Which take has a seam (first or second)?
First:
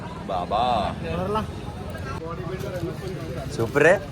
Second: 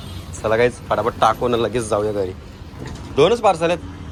first